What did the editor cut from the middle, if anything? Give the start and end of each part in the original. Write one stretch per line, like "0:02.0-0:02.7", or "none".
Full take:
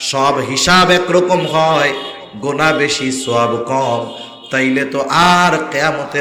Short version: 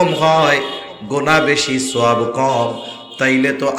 none